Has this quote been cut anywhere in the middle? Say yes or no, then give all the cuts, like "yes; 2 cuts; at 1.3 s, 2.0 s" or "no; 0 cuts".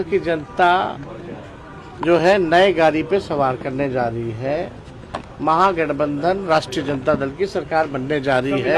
no; 0 cuts